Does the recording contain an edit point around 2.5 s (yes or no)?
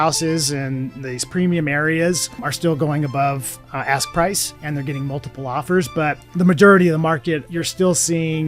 yes